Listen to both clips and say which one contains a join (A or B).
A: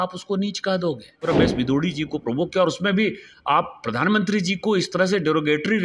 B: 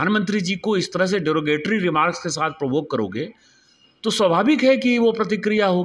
A